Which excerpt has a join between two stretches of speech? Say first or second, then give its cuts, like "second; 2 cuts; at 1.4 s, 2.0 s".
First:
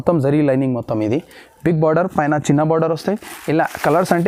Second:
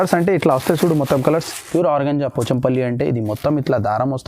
second; 1 cut; at 1.6 s